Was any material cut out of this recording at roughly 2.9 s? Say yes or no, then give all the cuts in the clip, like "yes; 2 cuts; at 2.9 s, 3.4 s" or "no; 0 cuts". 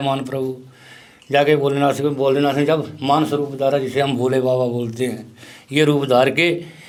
no; 0 cuts